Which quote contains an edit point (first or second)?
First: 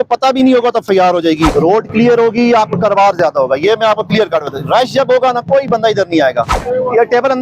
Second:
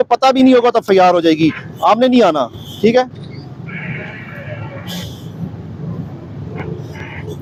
first